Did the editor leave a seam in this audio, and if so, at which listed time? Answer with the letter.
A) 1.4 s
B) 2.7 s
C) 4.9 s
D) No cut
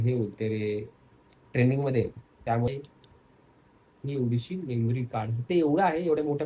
B